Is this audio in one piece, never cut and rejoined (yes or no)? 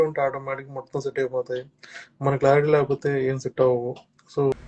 yes